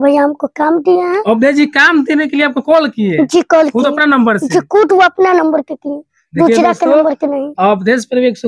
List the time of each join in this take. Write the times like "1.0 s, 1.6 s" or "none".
none